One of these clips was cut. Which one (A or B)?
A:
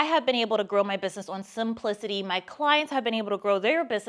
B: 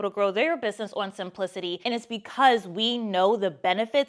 B